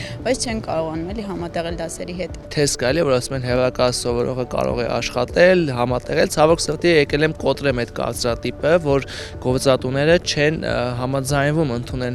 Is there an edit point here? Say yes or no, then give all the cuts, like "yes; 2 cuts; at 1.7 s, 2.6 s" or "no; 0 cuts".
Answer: no; 0 cuts